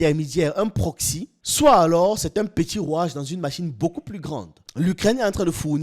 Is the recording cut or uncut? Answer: cut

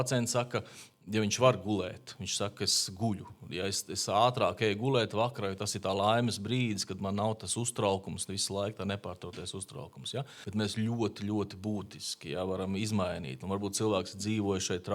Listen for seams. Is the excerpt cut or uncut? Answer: cut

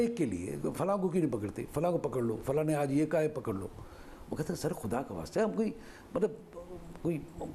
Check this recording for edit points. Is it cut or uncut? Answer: uncut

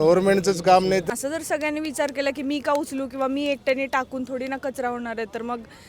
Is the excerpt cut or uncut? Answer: cut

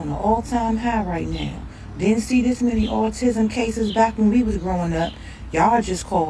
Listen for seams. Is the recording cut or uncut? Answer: uncut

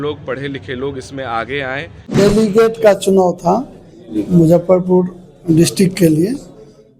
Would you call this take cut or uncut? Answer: cut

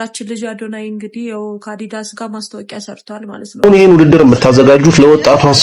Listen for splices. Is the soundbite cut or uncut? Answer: cut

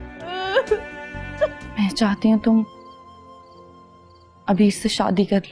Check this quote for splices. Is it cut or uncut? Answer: cut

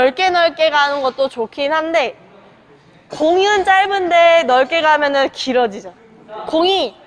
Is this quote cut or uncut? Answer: uncut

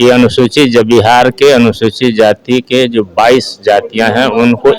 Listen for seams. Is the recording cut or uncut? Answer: uncut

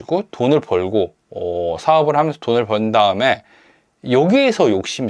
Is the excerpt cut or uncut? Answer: uncut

